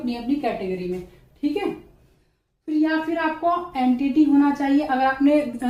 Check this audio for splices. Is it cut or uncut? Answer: uncut